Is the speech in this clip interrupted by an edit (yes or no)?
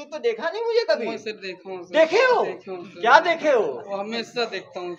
no